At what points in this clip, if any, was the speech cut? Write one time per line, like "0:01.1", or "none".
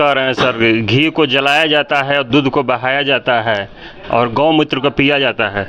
none